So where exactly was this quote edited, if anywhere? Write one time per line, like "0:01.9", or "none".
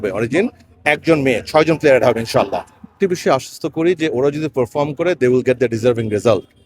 0:02.9